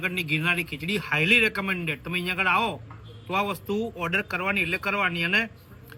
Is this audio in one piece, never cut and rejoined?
yes; 0 cuts

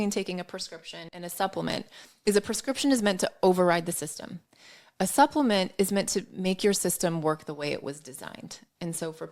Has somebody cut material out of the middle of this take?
yes; 1 cut; at 1.1 s

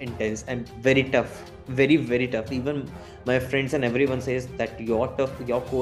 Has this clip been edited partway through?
no; 0 cuts

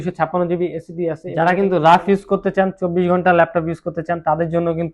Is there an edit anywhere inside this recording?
yes; 1 cut; at 1.2 s

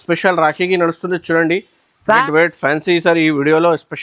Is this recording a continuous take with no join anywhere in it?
no; 1 cut; at 2.2 s

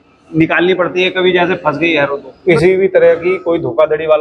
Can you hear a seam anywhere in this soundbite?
yes; 1 cut; at 2.3 s

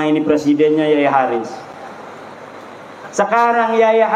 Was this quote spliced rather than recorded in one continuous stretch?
no; 0 cuts

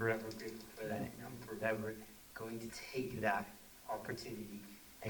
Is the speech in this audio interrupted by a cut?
no; 0 cuts

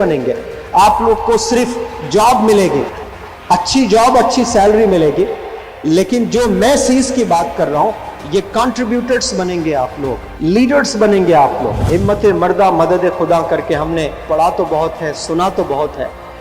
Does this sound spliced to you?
yes; 2 cuts; at 10.3 s, 11.8 s

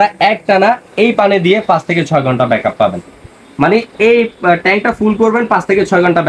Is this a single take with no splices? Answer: yes; 0 cuts

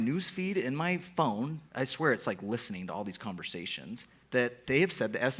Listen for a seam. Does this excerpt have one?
yes; 2 cuts; at 1.6 s, 4.1 s

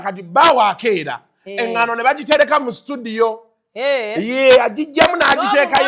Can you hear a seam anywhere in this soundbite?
no; 0 cuts

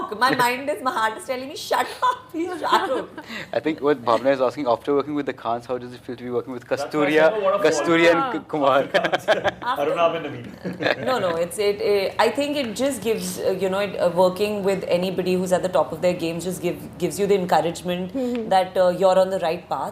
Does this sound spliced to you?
no; 0 cuts

